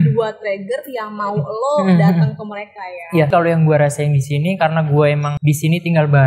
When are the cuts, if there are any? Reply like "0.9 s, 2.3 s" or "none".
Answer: 3.3 s, 5.3 s

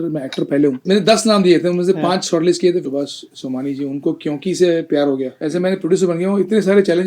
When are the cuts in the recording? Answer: 0.8 s, 2.8 s, 5.4 s

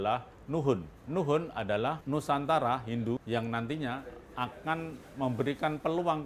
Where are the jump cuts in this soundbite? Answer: 0.9 s, 2.0 s, 3.2 s

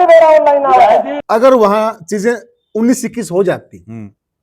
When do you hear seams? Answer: 1.2 s

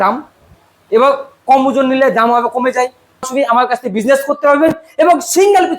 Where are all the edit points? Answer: 3.3 s

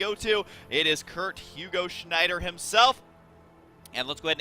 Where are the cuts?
2.0 s

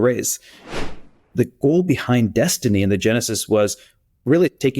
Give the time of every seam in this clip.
1.1 s

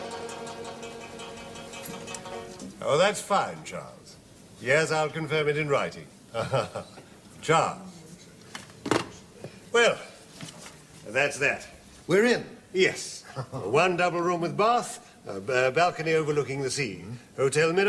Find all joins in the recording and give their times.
16.7 s

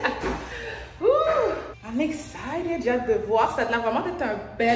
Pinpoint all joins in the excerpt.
1.7 s

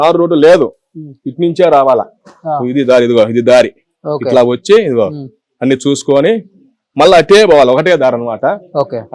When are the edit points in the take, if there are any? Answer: none

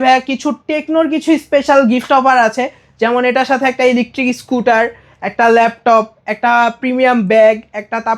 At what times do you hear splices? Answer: none

